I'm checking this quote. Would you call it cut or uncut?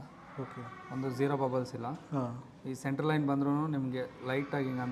uncut